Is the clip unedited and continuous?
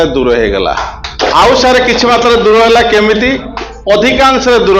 no; 1 cut; at 1.0 s

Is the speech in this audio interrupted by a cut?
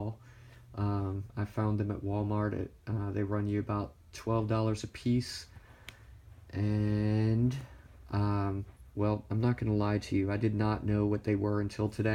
yes; 1 cut; at 6.6 s

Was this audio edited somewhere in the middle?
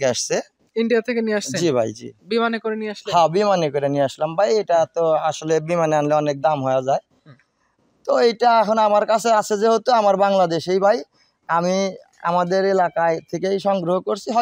no; 0 cuts

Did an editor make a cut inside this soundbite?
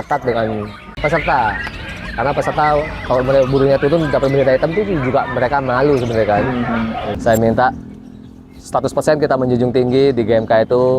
yes; 2 cuts; at 1.0 s, 7.1 s

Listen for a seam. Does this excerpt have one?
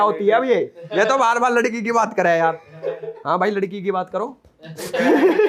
no; 0 cuts

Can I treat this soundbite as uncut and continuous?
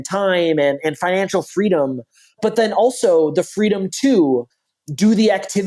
yes; 0 cuts

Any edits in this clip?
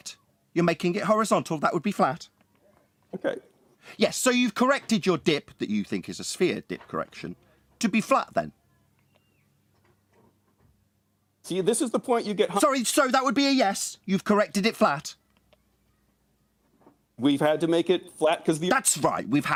no; 0 cuts

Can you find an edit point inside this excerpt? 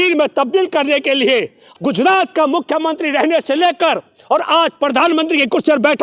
yes; 1 cut; at 1.7 s

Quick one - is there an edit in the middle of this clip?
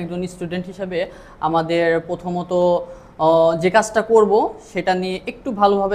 no; 0 cuts

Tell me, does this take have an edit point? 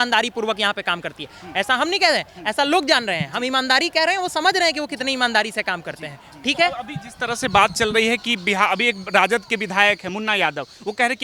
no; 0 cuts

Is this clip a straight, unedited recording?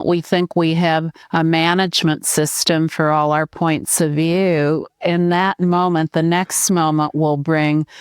no; 1 cut; at 1.2 s

